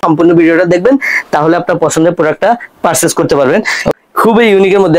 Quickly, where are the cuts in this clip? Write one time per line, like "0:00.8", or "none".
0:03.9

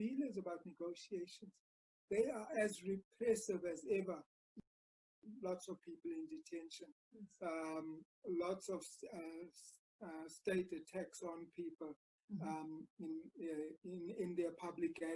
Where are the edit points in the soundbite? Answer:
0:04.9

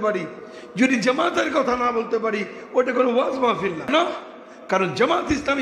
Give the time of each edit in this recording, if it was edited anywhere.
0:03.9

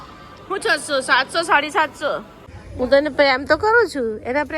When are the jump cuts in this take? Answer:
0:02.4

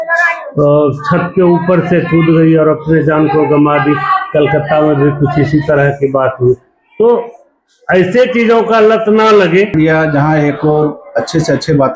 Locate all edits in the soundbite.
0:09.7

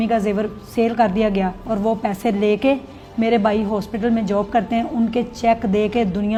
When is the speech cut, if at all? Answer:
none

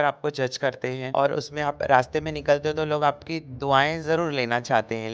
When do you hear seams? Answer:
0:01.0

